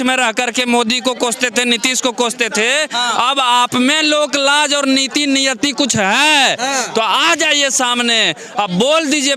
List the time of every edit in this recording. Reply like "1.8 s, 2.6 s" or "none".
none